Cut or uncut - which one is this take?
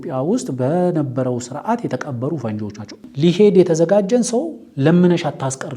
cut